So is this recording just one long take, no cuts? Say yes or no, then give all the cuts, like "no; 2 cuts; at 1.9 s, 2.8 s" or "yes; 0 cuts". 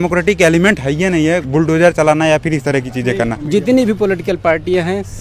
no; 2 cuts; at 1.4 s, 3.4 s